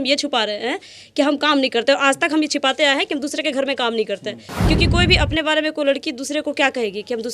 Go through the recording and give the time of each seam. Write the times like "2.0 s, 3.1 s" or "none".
none

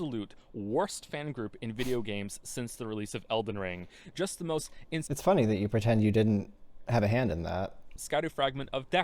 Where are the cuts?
8.0 s

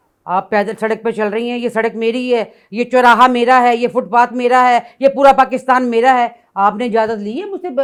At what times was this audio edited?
none

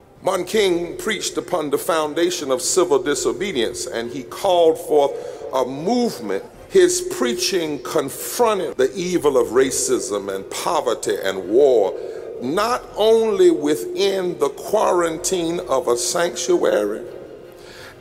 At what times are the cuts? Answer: 6.5 s, 8.7 s

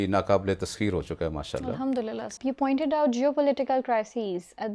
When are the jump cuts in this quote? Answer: 2.3 s

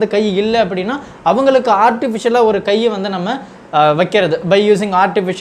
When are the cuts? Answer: none

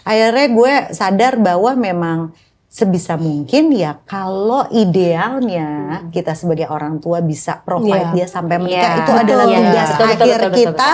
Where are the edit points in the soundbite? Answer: none

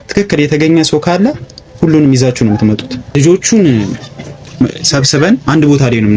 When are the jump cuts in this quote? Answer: 3.1 s

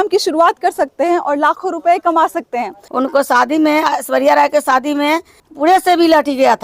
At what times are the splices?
2.8 s, 5.4 s

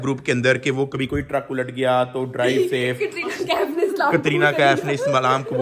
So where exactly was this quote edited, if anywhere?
none

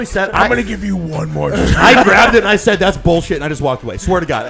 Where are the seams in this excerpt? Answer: none

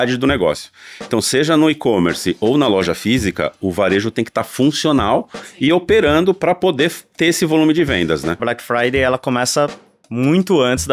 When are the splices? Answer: 8.4 s

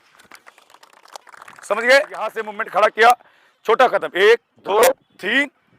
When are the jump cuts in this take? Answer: 2.5 s

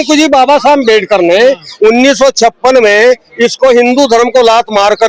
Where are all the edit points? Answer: none

